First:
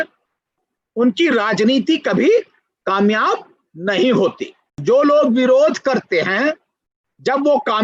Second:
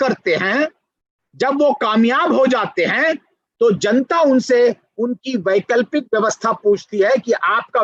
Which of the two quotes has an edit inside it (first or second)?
first